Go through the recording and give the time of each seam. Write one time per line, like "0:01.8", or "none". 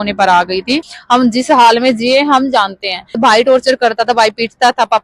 0:00.9
0:03.2